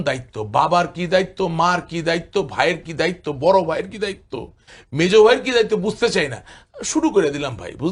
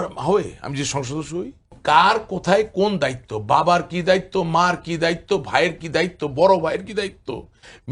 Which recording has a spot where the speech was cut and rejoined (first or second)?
second